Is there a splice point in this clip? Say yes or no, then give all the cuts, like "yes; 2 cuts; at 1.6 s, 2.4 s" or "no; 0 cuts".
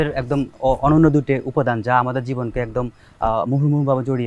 no; 0 cuts